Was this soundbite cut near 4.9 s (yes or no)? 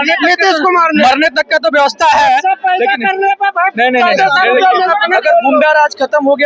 yes